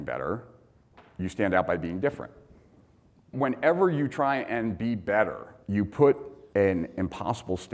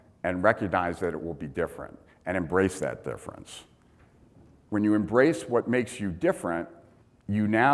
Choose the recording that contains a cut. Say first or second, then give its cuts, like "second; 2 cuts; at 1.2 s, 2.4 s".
first; 2 cuts; at 3.3 s, 6.3 s